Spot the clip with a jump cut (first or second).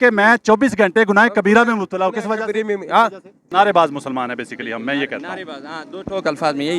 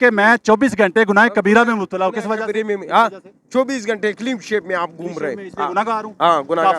first